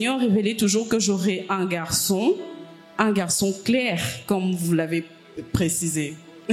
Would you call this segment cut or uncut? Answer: uncut